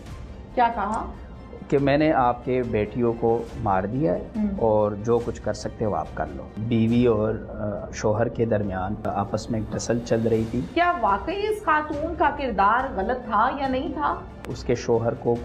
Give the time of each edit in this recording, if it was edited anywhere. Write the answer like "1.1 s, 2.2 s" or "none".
6.5 s, 9.0 s, 10.7 s, 14.5 s